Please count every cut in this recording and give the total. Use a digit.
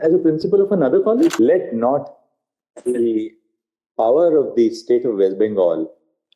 1